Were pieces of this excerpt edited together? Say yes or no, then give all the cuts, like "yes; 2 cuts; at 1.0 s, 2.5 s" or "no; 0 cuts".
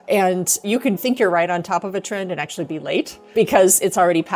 yes; 1 cut; at 3.2 s